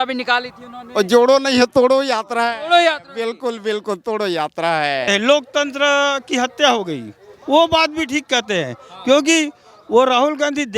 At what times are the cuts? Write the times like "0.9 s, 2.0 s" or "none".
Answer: 5.1 s